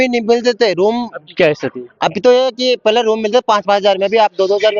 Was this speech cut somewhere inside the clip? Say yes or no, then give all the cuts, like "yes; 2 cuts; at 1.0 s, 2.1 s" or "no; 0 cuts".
no; 0 cuts